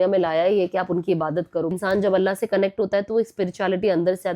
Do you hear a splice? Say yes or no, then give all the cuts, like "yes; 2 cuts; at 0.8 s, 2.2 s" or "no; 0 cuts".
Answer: yes; 1 cut; at 1.7 s